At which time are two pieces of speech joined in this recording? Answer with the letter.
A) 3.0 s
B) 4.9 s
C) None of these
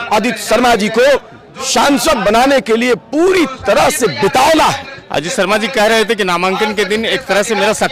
B